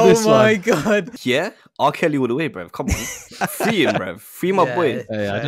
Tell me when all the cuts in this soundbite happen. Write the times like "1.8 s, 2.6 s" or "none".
1.1 s, 3.4 s

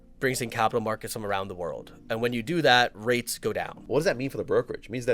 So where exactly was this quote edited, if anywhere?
3.7 s

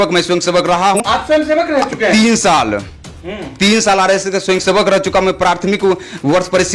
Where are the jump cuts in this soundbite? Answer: 1.0 s

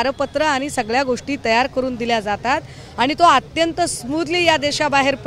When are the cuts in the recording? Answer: none

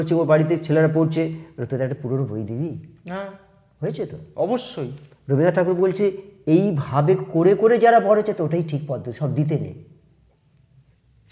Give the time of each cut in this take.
none

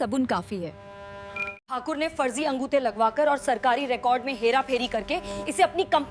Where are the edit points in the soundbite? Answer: 1.5 s

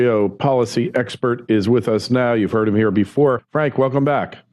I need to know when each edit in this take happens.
1.4 s

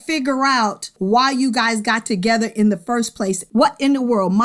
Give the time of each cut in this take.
3.4 s

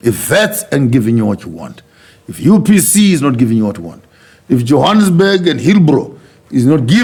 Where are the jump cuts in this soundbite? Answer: none

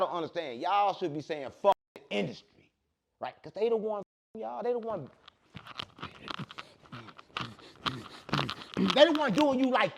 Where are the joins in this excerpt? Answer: none

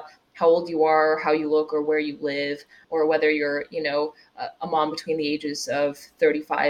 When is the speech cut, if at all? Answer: 2.7 s

